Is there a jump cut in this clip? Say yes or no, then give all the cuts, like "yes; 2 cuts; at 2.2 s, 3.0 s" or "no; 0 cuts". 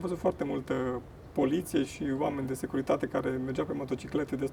no; 0 cuts